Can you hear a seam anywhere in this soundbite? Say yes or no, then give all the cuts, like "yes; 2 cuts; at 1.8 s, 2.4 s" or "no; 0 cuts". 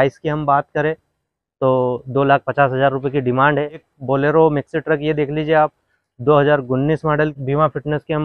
yes; 2 cuts; at 3.9 s, 7.3 s